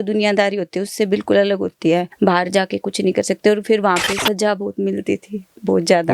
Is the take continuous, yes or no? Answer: no